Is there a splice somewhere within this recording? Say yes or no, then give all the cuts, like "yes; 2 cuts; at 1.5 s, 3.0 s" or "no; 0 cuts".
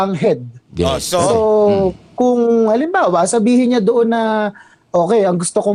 no; 0 cuts